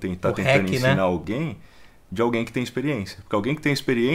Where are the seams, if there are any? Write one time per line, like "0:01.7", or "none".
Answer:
0:01.2